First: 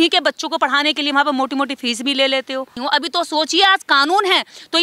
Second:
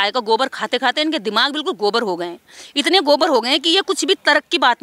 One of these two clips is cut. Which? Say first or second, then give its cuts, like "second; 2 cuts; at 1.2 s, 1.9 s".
first; 1 cut; at 2.7 s